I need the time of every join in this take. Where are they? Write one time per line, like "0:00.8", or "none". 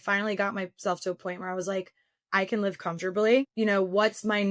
0:03.5